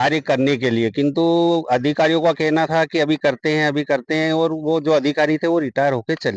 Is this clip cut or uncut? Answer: uncut